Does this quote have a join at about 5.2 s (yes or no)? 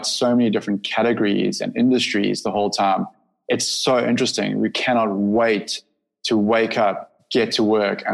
no